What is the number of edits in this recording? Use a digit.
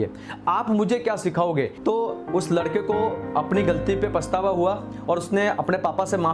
1